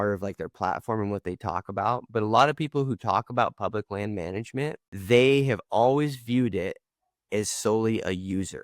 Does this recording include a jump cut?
yes; 1 cut; at 4.9 s

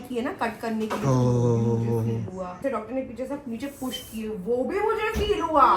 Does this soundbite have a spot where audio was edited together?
yes; 1 cut; at 2.6 s

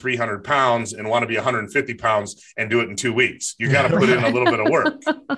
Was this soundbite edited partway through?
no; 0 cuts

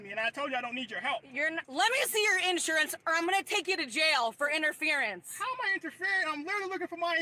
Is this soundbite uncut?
yes; 0 cuts

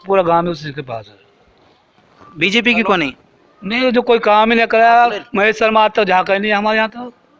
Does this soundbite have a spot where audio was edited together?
no; 0 cuts

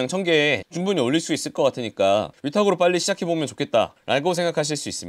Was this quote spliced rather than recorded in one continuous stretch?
no; 0 cuts

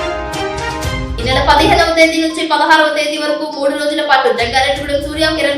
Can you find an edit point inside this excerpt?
no; 0 cuts

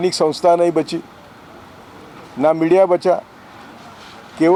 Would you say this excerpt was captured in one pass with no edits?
yes; 0 cuts

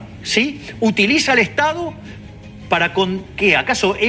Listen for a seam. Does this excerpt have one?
no; 0 cuts

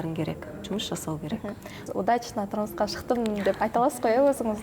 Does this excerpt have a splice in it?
yes; 1 cut; at 1.9 s

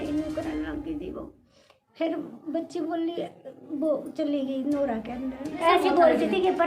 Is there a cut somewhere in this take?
yes; 1 cut; at 5.6 s

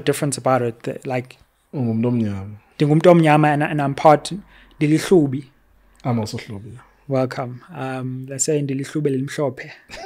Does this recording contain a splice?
no; 0 cuts

